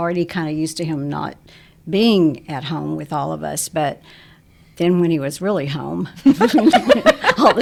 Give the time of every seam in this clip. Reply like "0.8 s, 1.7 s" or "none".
none